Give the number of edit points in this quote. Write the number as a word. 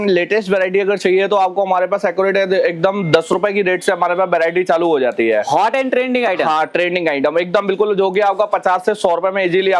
zero